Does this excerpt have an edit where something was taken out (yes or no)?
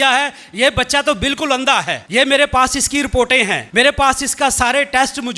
yes